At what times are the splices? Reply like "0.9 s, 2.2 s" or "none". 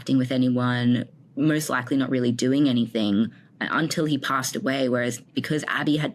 5.2 s